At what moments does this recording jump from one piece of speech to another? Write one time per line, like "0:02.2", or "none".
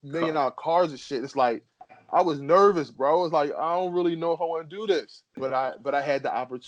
0:05.4